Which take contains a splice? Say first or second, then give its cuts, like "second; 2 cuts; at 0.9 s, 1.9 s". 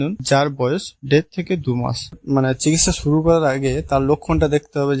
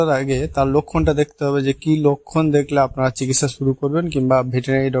first; 1 cut; at 2.2 s